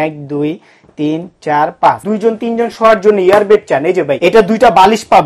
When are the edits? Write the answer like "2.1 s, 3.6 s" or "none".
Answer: 2.0 s, 4.1 s